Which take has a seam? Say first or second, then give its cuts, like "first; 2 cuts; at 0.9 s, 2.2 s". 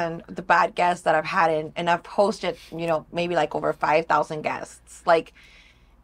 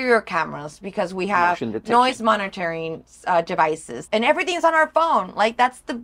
second; 1 cut; at 3.9 s